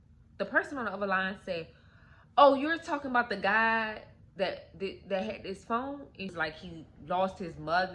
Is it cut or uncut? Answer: cut